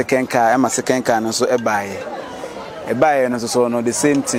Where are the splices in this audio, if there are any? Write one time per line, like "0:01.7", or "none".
none